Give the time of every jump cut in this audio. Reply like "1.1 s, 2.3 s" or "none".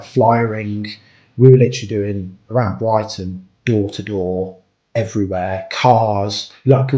none